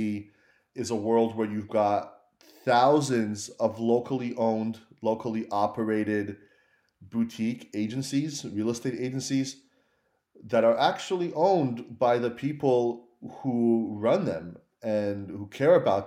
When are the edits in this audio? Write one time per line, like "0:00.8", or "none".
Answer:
none

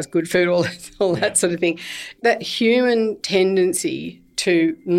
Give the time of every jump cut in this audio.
0:02.1

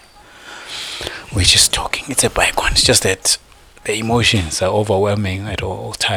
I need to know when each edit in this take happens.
none

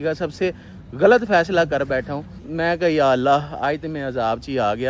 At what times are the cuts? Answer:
0:02.4

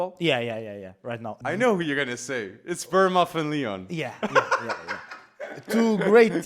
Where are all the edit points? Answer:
0:01.3

